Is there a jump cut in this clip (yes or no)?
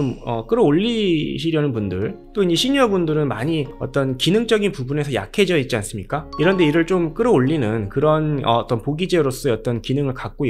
yes